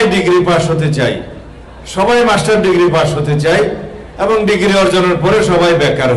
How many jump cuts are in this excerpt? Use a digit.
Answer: 0